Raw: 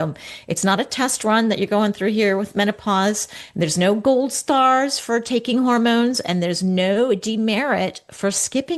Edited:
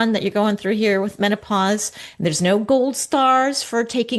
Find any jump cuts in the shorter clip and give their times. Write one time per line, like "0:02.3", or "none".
none